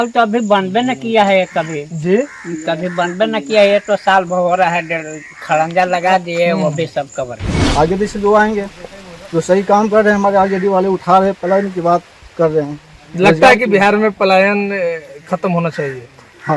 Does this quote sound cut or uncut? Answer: cut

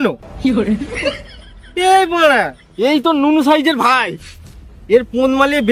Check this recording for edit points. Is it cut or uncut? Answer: uncut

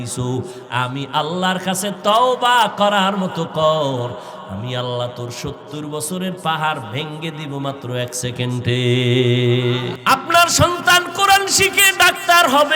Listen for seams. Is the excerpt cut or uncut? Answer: cut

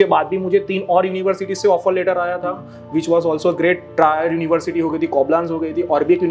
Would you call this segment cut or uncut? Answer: uncut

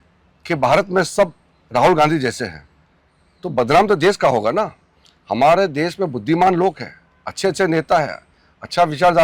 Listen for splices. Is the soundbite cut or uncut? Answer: uncut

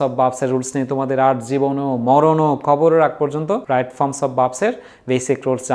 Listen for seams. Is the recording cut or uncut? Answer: cut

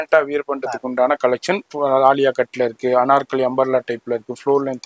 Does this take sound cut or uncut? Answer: uncut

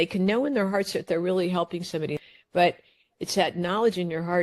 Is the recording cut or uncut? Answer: cut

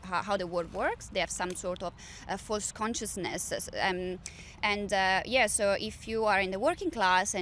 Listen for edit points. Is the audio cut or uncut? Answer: uncut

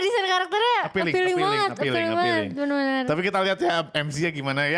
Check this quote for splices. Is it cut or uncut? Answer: uncut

